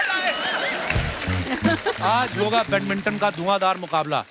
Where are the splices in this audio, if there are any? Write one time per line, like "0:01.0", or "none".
0:01.2

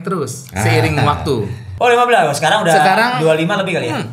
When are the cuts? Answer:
0:01.6

